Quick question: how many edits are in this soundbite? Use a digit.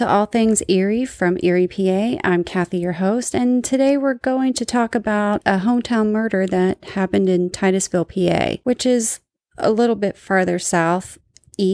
2